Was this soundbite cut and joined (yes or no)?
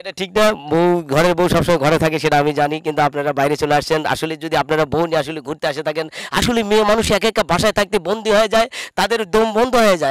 no